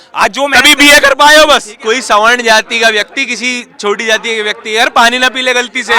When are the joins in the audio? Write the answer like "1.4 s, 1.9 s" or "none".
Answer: 1.7 s